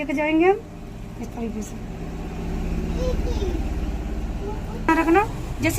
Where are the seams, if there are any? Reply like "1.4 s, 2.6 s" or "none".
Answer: 4.9 s